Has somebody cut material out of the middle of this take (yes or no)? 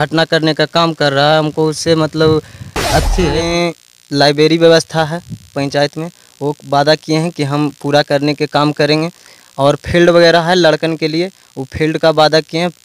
yes